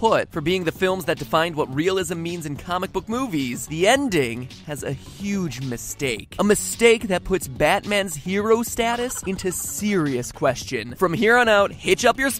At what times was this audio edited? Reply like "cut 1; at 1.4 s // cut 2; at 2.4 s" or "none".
none